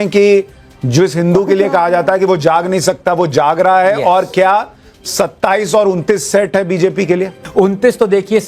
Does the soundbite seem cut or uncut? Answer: cut